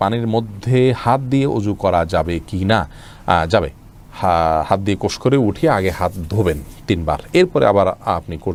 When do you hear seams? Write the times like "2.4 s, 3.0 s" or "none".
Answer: none